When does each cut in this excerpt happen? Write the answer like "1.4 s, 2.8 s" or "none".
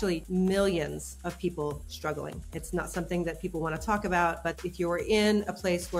none